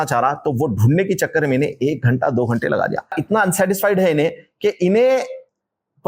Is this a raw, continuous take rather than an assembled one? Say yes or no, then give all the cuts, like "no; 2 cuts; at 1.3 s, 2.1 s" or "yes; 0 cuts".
no; 1 cut; at 3.2 s